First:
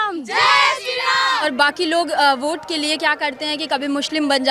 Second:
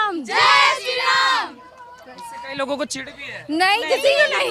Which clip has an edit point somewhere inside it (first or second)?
first